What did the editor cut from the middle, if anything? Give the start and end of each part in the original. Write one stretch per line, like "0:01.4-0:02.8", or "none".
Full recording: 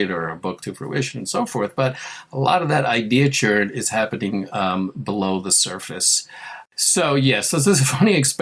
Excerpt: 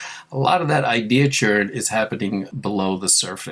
0:04.5-0:04.9